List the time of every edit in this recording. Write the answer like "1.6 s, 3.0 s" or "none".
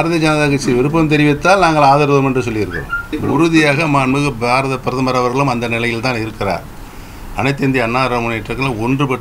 3.1 s

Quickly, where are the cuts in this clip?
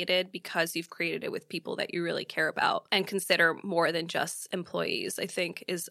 none

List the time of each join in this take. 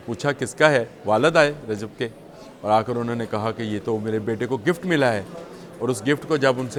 none

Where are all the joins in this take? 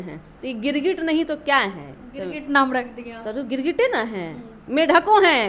none

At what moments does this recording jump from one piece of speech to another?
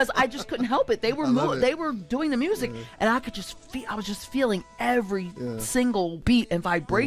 6.2 s

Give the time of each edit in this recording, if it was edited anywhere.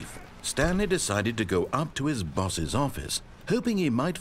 none

